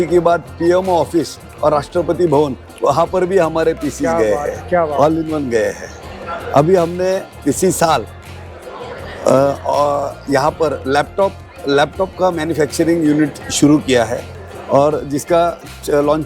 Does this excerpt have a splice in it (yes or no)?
no